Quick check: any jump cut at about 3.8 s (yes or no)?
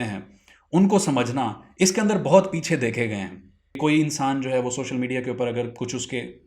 yes